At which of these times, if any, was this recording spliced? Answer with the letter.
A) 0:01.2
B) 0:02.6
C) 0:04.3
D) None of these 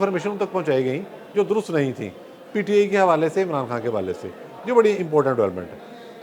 D